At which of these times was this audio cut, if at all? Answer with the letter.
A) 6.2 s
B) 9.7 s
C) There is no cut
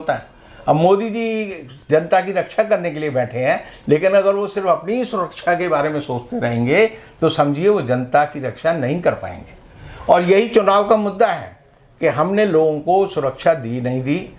C